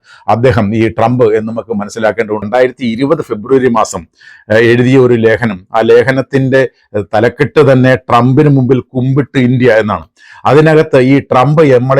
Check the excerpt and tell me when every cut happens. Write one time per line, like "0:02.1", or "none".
0:02.4